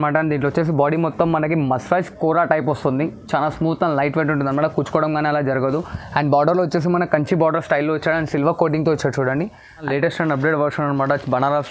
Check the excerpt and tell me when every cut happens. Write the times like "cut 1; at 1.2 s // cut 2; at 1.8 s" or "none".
cut 1; at 9.9 s